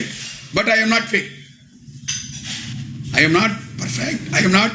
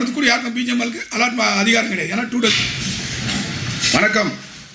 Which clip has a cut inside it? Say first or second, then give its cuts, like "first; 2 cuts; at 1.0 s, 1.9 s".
second; 1 cut; at 2.5 s